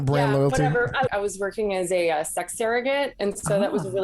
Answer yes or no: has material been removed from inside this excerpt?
yes